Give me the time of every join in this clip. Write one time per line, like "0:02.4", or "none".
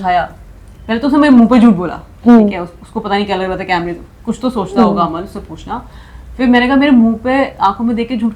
none